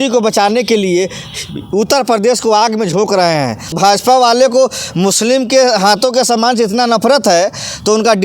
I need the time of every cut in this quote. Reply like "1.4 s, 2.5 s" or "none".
3.7 s